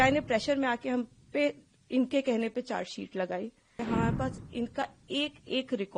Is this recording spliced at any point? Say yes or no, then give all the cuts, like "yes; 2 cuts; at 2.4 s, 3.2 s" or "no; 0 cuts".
yes; 1 cut; at 3.8 s